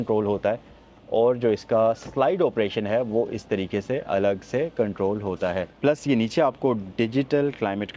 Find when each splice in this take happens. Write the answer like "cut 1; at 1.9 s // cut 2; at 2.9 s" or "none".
cut 1; at 5.8 s